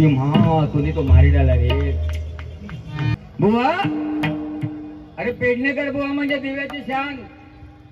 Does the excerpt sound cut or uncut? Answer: cut